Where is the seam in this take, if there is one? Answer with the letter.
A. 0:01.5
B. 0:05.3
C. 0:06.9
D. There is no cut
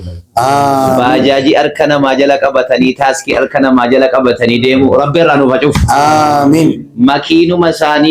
D